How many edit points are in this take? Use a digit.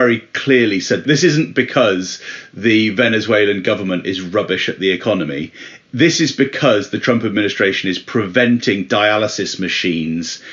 1